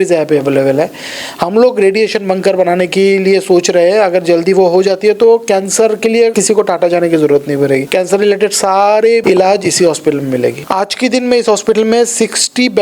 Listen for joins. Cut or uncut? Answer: cut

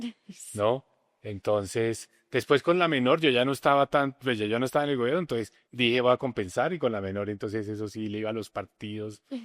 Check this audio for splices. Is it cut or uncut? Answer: cut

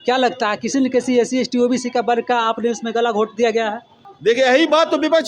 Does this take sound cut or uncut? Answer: uncut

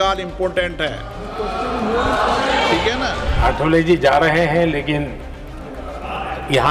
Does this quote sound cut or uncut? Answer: cut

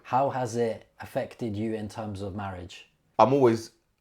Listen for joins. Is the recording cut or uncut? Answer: cut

